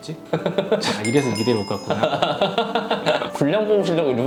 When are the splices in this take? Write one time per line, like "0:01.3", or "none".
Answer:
none